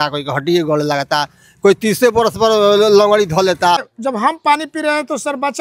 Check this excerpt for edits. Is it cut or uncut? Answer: cut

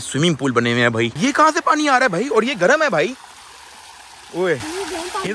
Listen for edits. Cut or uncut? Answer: uncut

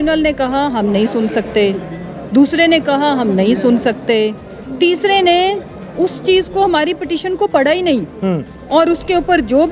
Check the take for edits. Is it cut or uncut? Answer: uncut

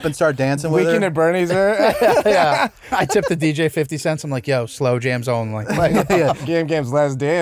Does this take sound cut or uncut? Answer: cut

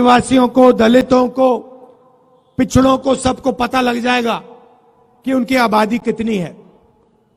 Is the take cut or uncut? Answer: uncut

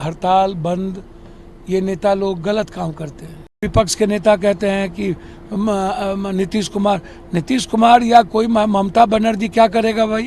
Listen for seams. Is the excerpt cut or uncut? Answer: cut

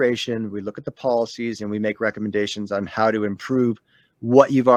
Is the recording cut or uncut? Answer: uncut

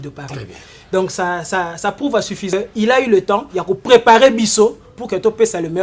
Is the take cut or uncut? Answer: cut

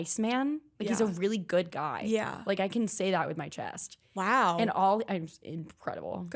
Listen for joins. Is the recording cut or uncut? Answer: uncut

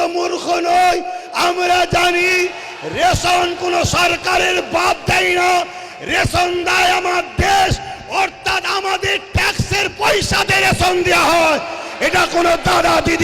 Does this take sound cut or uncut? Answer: uncut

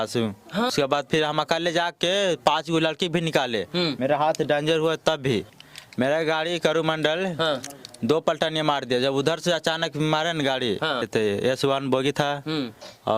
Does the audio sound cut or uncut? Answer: cut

